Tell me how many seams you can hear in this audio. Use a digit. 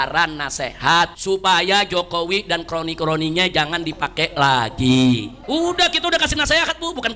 2